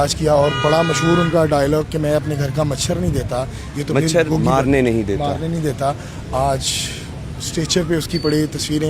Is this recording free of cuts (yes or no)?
yes